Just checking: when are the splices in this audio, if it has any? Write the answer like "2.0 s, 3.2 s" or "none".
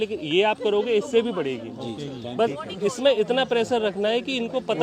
none